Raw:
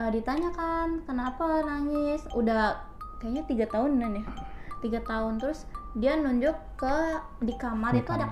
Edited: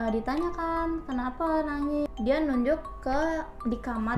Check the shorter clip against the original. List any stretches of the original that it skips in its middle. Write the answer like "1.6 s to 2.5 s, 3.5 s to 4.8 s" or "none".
2.1 s to 5.8 s